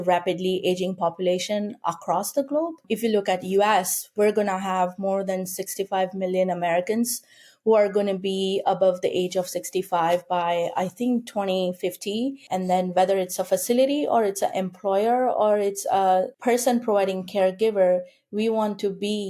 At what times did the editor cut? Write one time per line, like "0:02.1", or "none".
0:02.8
0:12.5
0:16.3